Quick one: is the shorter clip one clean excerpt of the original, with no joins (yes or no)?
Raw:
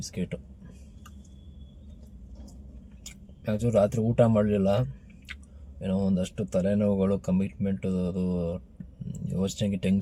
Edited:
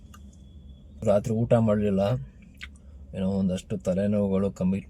no